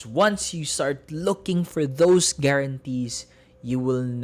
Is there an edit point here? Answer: no; 0 cuts

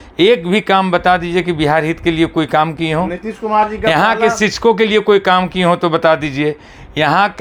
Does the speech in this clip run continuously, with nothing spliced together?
yes; 0 cuts

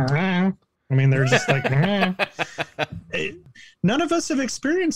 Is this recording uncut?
no; 1 cut; at 3.5 s

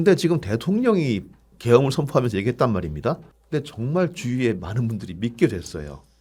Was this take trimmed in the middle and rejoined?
no; 0 cuts

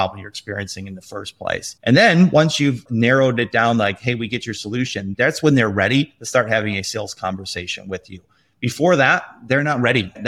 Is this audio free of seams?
no; 1 cut; at 2.8 s

